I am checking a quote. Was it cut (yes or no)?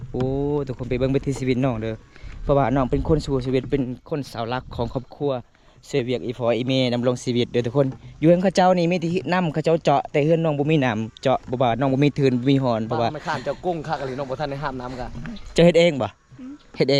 no